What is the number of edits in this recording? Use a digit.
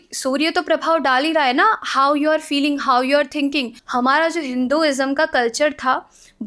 1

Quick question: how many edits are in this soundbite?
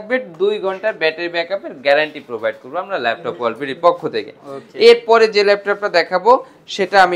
0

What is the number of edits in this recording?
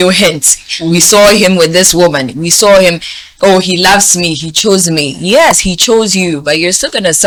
0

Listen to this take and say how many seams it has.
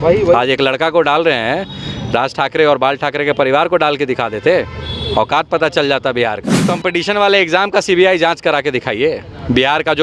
1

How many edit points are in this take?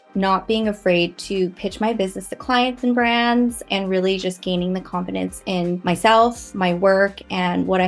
2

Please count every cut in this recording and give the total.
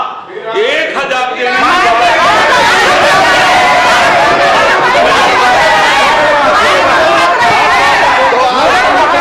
0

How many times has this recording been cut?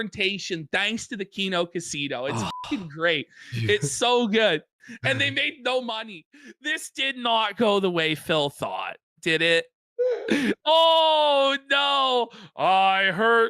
1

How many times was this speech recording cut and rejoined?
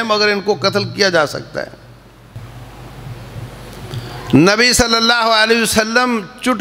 1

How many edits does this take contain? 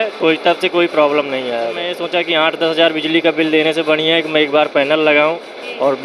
1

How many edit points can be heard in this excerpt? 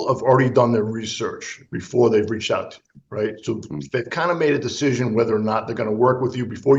0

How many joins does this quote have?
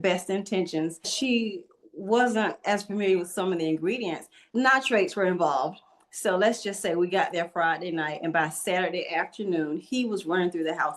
2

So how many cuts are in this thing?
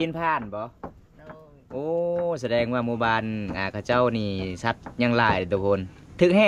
0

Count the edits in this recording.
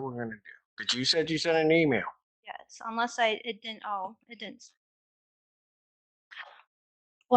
1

